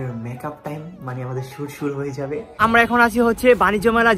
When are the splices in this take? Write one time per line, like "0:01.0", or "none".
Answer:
0:02.5